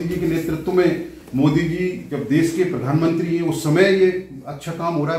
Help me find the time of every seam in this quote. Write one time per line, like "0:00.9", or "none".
none